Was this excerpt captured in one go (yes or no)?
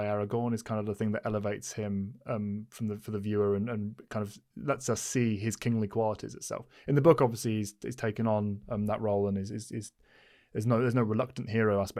yes